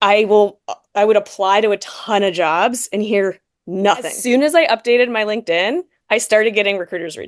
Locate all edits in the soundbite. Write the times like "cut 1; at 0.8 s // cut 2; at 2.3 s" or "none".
cut 1; at 4.2 s